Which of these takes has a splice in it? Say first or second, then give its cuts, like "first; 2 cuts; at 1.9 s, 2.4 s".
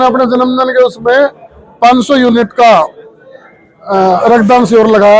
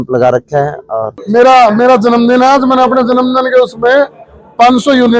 second; 1 cut; at 1.1 s